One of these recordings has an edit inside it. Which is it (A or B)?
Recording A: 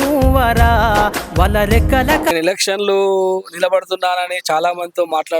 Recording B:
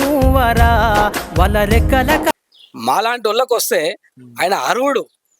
A